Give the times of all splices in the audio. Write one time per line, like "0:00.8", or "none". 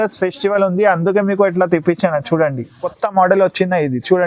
0:02.8